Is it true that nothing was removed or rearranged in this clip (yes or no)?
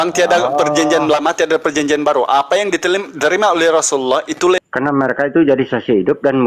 no